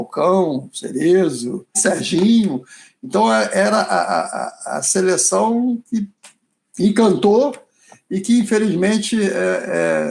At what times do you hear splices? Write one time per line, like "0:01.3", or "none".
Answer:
0:01.8